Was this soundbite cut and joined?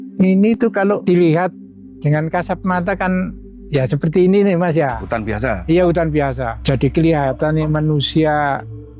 yes; 2 cuts; at 1.0 s, 6.5 s

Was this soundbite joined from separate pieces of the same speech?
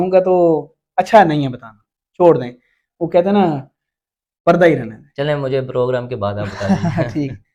no; 0 cuts

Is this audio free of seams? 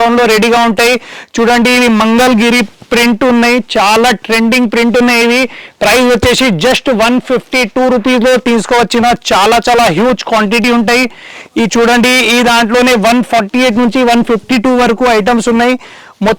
yes; 0 cuts

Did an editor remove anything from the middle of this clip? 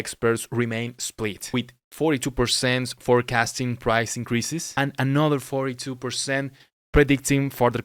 no; 0 cuts

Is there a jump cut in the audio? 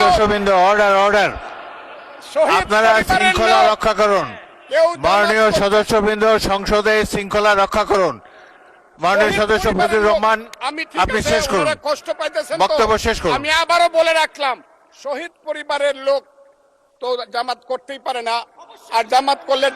no; 0 cuts

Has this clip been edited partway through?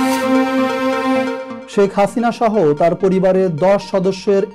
no; 0 cuts

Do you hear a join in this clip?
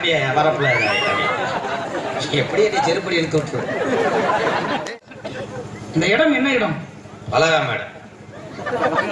yes; 1 cut; at 4.8 s

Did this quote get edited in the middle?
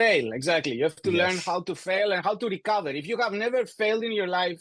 no; 0 cuts

